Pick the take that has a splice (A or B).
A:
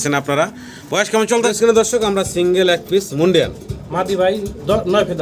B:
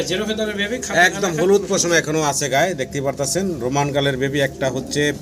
A